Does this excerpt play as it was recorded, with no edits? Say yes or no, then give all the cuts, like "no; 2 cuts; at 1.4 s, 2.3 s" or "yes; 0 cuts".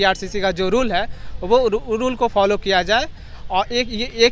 yes; 0 cuts